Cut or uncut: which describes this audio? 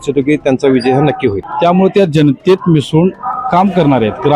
cut